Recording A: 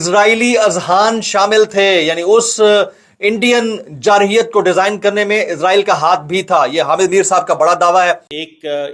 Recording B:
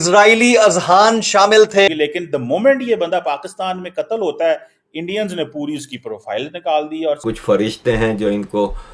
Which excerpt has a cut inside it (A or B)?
B